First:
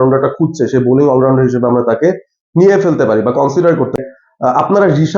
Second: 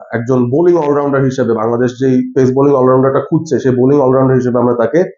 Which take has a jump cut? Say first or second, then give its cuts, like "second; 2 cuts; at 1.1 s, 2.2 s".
first; 1 cut; at 4.0 s